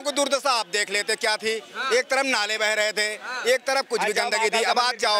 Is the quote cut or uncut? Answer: uncut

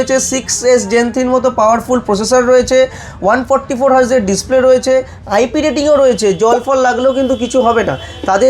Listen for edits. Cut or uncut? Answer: uncut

